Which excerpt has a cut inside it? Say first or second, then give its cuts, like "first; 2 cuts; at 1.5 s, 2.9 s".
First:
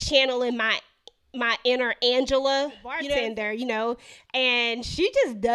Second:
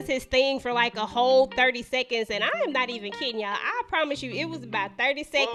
first; 1 cut; at 3.0 s